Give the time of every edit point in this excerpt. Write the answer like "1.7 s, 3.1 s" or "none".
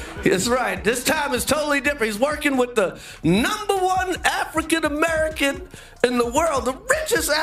none